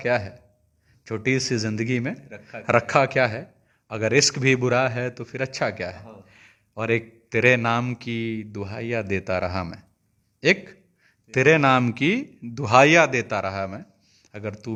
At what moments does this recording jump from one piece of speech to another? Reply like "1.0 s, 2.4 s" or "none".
none